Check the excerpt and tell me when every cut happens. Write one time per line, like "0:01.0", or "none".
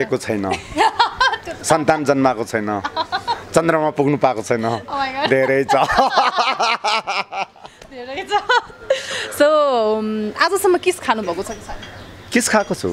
none